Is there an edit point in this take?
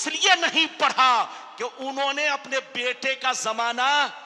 no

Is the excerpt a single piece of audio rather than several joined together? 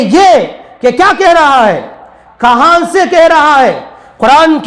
yes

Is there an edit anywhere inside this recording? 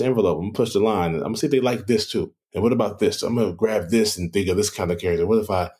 yes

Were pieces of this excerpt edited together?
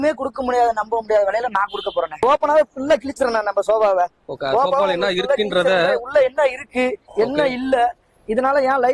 yes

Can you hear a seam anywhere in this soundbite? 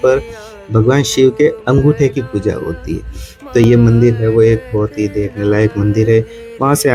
no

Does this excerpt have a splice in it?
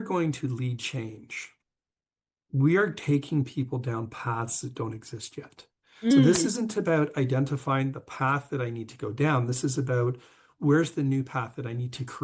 no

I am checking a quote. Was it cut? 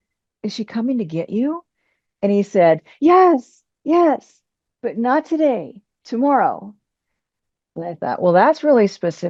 no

